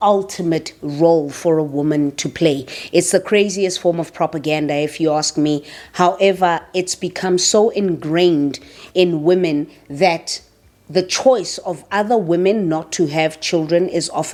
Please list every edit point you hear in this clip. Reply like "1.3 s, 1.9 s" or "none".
none